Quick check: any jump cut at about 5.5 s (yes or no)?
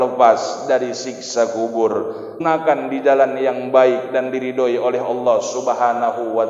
no